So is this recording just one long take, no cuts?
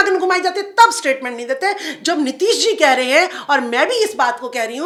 yes; 0 cuts

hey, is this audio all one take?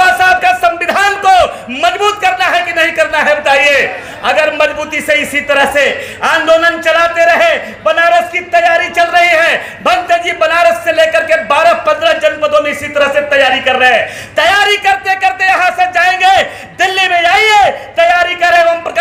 yes; 0 cuts

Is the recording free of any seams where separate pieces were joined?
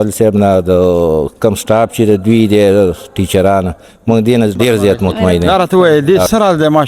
no; 1 cut; at 5.4 s

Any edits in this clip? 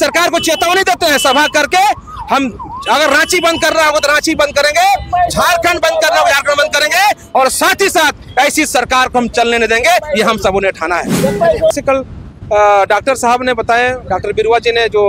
yes; 1 cut; at 11.7 s

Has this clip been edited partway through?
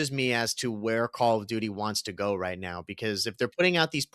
no; 0 cuts

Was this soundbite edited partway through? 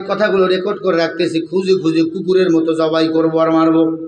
no; 0 cuts

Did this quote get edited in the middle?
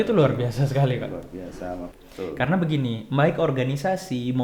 yes; 1 cut; at 1.9 s

